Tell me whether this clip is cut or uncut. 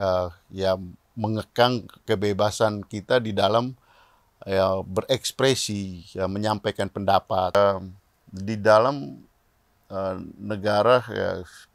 cut